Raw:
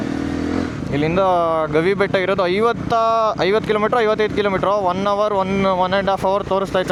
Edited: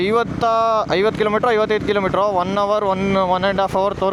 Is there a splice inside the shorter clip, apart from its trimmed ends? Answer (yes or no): no